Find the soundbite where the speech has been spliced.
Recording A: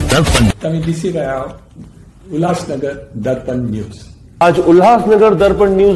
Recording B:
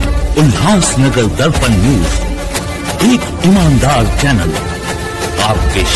A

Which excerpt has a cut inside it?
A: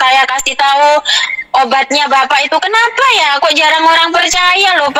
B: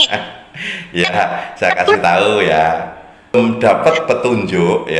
B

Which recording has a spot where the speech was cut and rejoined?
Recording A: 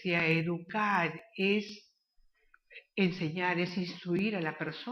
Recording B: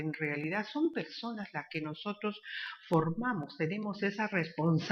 A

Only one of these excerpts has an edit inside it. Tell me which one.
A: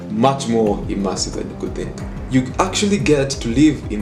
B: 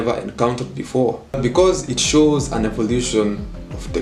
B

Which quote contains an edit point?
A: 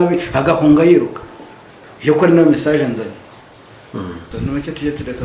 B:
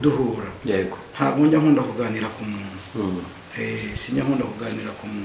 A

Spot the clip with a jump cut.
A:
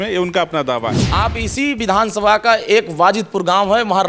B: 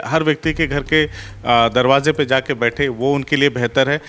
A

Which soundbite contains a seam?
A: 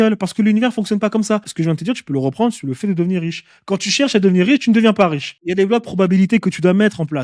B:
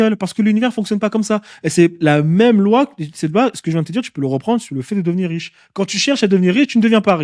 A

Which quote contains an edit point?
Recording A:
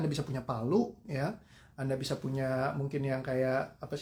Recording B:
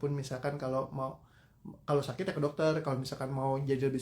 B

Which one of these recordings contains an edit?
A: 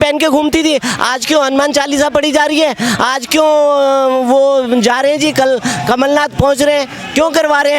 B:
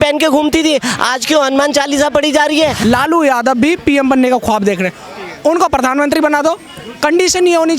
B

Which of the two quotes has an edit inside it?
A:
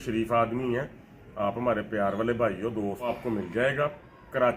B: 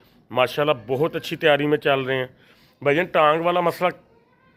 A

